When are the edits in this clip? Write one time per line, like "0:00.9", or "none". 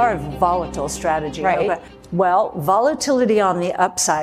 none